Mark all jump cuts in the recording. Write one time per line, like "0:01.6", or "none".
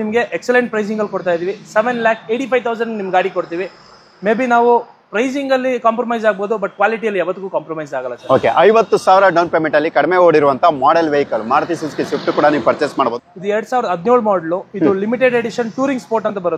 0:08.1
0:12.9